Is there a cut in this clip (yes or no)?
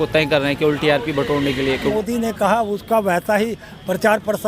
yes